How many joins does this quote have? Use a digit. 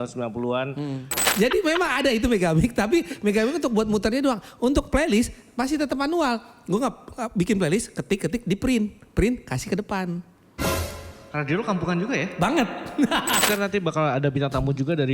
2